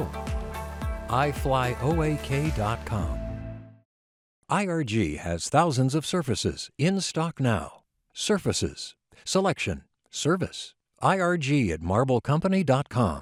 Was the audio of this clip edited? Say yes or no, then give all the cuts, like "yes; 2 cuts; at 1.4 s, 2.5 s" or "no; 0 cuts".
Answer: no; 0 cuts